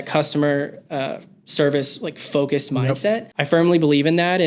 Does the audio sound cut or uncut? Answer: cut